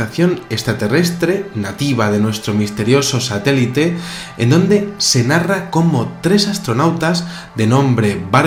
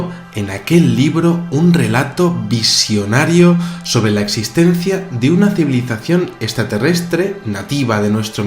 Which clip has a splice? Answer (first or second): second